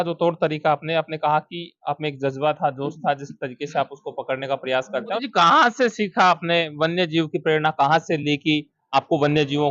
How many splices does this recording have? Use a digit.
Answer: 1